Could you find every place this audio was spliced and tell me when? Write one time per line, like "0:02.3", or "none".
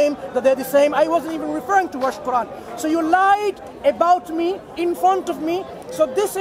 none